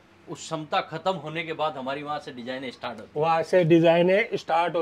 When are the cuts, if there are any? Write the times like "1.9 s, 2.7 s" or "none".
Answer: none